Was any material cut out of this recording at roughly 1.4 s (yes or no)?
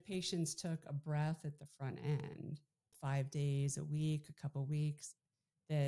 no